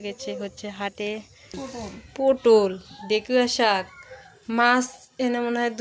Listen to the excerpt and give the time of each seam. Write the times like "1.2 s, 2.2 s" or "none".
1.6 s